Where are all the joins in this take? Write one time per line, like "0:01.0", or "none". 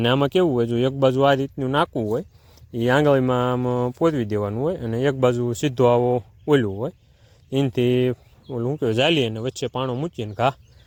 none